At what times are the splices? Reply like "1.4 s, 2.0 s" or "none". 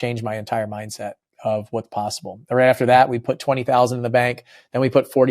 none